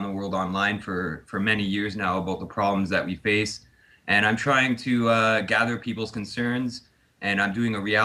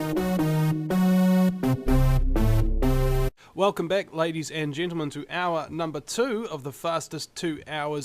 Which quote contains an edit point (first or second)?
first